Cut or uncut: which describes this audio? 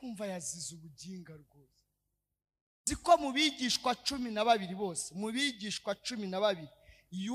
cut